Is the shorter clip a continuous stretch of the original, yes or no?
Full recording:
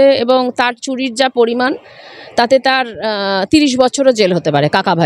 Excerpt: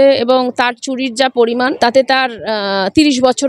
no